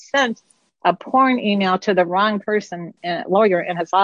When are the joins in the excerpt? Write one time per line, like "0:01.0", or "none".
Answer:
0:02.9